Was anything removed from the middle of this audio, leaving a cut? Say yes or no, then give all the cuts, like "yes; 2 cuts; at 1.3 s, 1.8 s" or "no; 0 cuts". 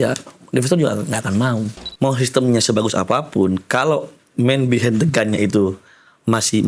yes; 1 cut; at 1.8 s